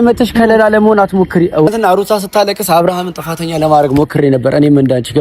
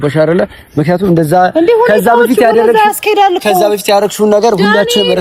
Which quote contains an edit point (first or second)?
first